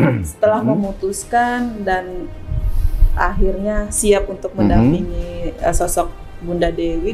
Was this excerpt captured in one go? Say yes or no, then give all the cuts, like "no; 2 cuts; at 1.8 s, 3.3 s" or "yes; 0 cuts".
yes; 0 cuts